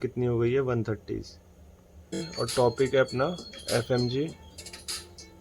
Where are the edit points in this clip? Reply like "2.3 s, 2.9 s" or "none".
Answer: 2.3 s